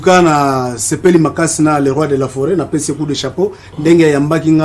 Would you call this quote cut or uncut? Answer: uncut